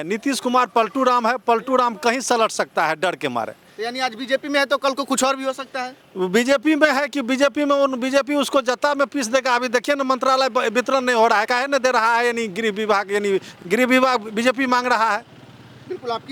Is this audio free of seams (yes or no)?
yes